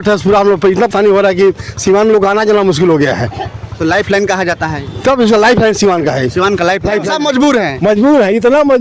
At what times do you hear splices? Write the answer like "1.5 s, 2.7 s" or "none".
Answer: 0.9 s, 7.0 s

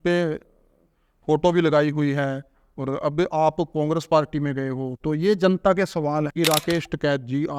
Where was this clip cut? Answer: 6.3 s

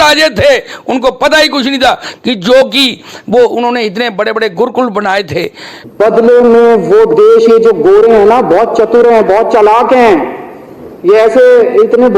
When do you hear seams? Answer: 5.8 s

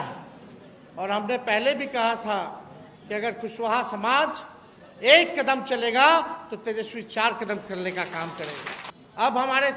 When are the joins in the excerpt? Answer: 8.9 s

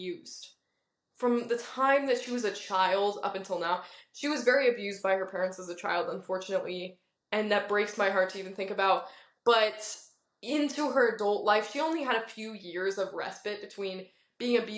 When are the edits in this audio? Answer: none

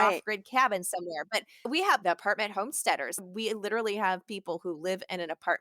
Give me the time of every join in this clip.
1.6 s, 3.2 s

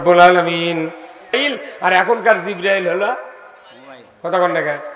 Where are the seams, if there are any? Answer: 1.3 s

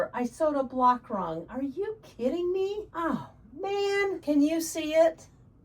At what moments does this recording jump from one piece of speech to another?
2.9 s, 4.2 s

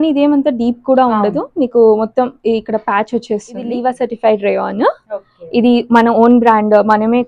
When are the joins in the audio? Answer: 3.7 s

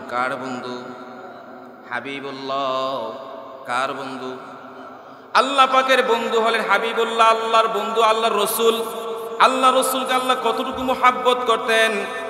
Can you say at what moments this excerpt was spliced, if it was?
none

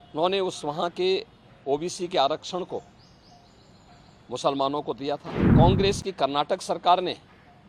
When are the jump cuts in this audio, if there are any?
5.4 s

